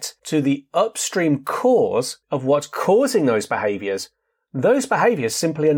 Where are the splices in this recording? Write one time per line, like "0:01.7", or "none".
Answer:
none